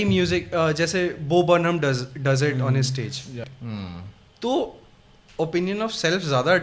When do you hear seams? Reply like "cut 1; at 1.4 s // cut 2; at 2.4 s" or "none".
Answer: cut 1; at 3.5 s